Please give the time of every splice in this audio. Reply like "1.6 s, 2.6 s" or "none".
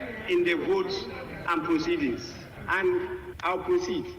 3.3 s